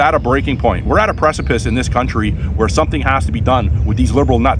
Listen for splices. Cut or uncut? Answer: uncut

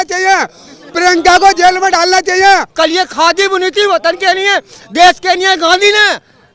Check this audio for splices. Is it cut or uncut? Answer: cut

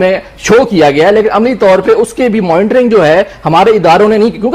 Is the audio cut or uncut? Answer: uncut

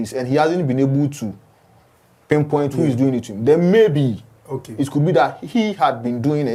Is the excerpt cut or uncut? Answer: uncut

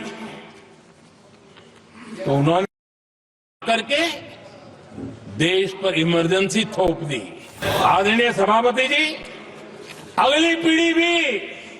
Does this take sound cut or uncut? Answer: cut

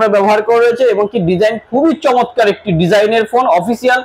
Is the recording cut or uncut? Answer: uncut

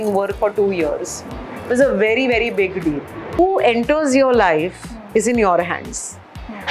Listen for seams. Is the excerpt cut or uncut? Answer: cut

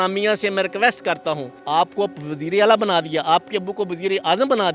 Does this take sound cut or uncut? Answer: cut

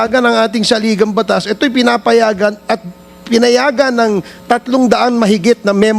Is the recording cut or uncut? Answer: uncut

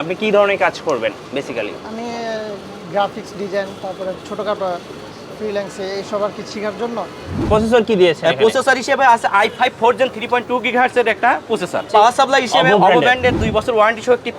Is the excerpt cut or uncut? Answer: cut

